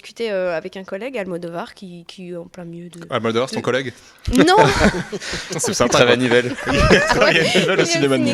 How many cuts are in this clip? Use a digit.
0